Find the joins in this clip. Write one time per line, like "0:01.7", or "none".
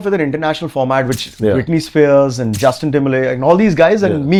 none